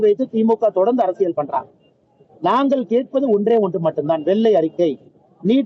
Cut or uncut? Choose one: uncut